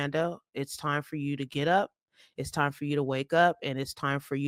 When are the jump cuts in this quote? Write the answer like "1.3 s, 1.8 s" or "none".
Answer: none